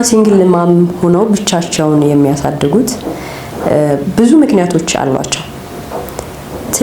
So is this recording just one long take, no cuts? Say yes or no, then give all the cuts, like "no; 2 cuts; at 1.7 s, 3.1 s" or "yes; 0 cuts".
yes; 0 cuts